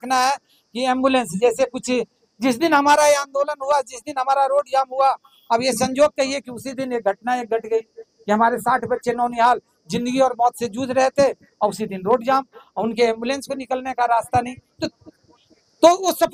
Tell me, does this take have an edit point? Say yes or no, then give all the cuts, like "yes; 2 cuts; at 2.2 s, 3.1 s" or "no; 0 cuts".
no; 0 cuts